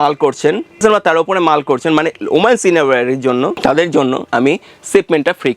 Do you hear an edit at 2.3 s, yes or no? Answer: no